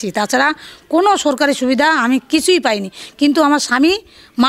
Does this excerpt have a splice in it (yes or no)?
no